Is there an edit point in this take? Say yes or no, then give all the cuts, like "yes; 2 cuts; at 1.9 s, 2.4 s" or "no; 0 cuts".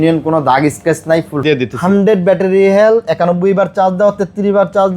yes; 1 cut; at 1.4 s